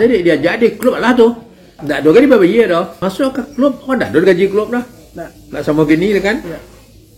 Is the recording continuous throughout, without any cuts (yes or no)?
no